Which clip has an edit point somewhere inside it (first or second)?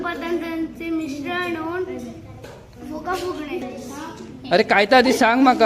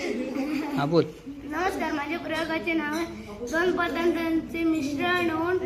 first